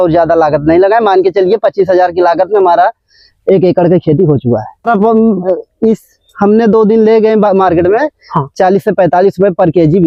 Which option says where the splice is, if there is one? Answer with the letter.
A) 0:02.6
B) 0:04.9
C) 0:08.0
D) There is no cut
B